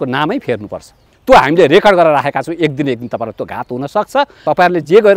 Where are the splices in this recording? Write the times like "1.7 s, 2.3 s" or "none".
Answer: 1.1 s, 4.4 s